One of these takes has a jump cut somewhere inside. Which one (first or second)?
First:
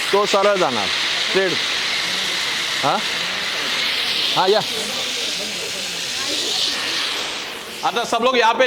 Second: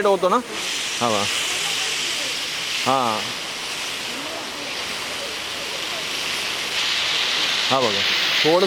first